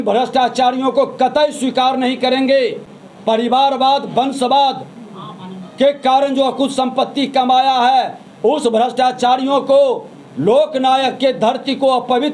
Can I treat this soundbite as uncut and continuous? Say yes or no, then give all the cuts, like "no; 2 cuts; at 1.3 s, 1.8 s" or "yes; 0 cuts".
yes; 0 cuts